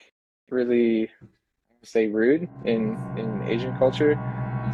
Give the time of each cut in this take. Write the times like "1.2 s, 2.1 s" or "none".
none